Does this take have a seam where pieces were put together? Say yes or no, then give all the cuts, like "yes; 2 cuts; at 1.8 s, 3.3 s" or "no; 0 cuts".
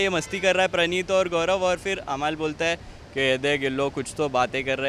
no; 0 cuts